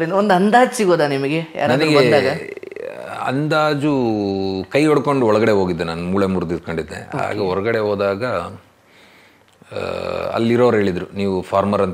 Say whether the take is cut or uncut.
uncut